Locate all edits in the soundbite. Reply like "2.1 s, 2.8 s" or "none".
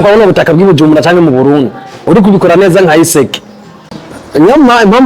4.0 s

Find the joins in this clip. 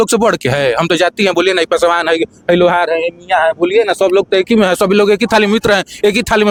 none

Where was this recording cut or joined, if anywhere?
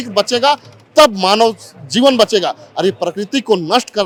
none

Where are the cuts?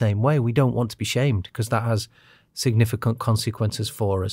none

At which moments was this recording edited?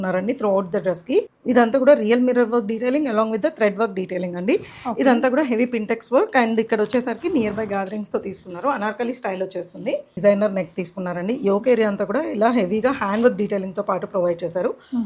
1.3 s, 10.2 s

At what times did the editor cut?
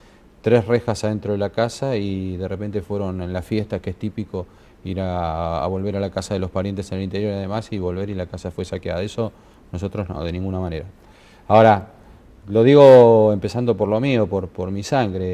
none

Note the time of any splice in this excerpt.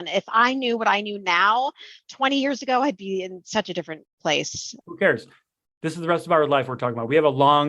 4.5 s

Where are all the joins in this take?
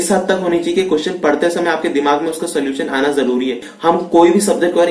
3.7 s

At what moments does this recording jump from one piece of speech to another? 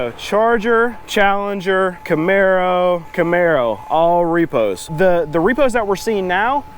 1.0 s, 2.0 s, 3.1 s, 4.9 s

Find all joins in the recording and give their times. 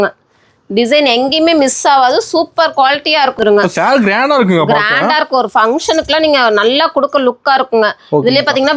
3.4 s

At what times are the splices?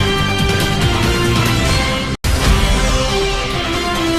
2.2 s

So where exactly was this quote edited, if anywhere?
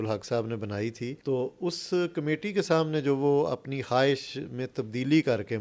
1.1 s

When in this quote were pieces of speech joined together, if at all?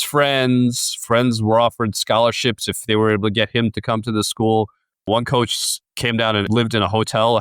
5.1 s, 6.5 s

